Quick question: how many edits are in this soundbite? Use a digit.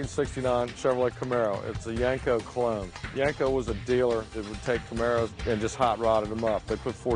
1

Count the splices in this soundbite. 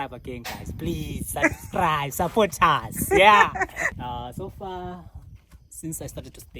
1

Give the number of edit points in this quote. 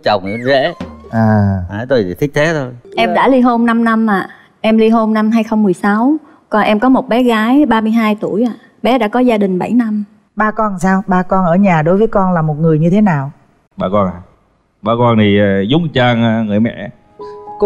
2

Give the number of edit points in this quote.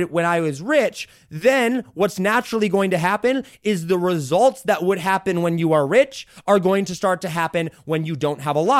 0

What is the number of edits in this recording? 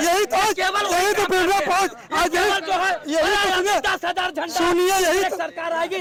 0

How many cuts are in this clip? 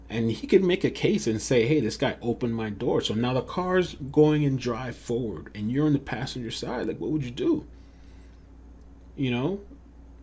0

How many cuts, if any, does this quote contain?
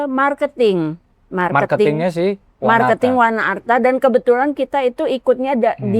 0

